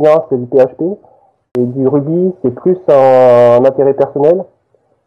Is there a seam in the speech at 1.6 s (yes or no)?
yes